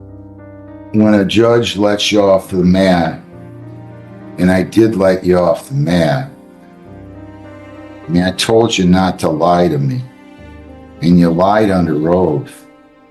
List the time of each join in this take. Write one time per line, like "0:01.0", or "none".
0:00.9
0:06.3
0:08.1